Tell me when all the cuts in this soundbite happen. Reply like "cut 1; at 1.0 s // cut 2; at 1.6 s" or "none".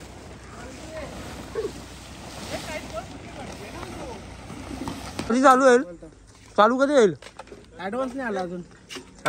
cut 1; at 5.3 s